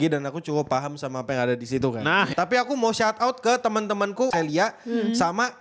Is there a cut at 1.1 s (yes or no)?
no